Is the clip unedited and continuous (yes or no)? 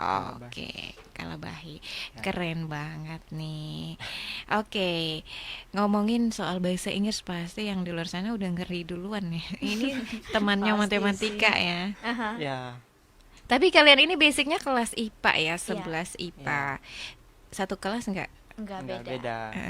yes